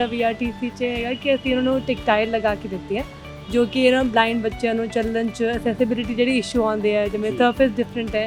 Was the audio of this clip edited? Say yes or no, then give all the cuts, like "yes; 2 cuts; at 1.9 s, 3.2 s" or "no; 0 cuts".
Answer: no; 0 cuts